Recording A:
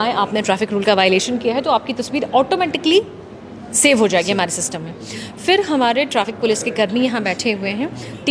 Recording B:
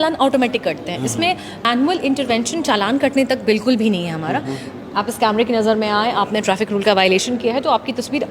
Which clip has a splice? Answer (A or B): B